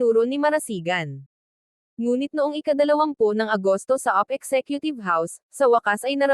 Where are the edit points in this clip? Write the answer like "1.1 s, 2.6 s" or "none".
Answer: 1.8 s